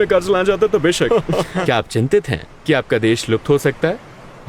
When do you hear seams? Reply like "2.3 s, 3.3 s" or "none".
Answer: 1.5 s